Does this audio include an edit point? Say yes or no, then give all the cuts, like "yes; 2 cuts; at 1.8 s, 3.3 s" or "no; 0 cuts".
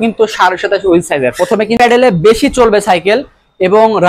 yes; 1 cut; at 1.8 s